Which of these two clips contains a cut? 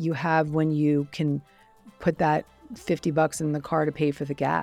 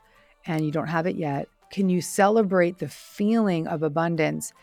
second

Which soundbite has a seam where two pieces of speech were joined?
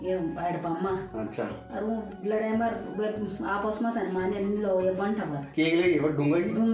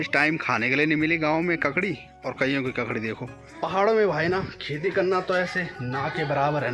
second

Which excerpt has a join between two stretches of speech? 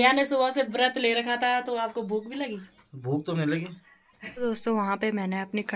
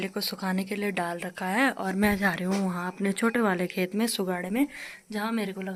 first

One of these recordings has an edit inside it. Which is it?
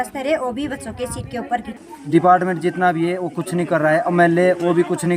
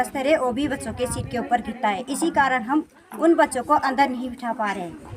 first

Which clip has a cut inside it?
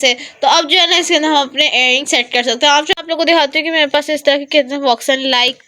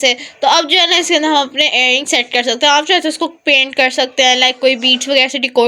first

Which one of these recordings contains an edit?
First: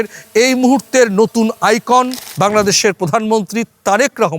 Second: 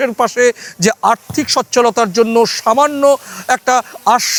first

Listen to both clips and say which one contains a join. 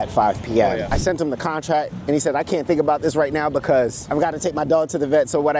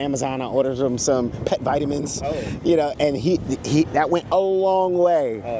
first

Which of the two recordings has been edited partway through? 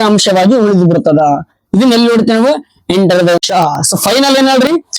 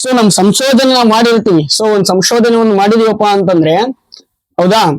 first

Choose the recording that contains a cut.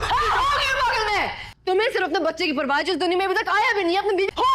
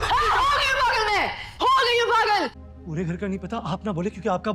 second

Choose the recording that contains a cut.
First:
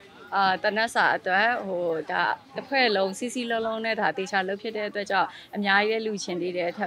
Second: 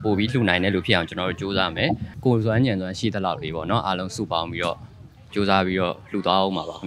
second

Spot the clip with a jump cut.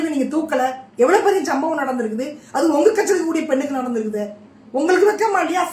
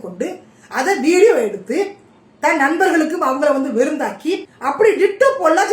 second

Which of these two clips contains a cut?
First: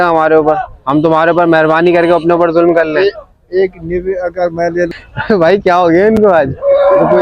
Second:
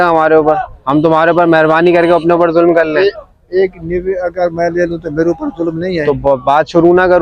first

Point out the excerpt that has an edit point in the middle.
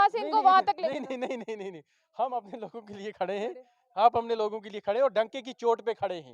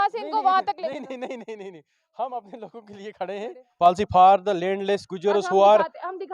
second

